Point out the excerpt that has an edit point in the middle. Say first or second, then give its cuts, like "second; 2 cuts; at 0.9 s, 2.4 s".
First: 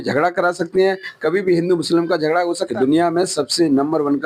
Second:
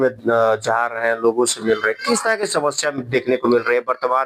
first; 1 cut; at 2.6 s